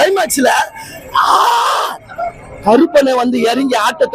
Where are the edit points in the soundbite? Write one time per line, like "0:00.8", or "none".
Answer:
none